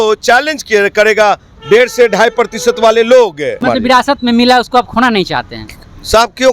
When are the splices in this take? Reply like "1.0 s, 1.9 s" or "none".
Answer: 3.6 s